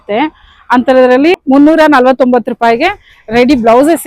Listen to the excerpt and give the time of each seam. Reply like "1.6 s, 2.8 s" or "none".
1.4 s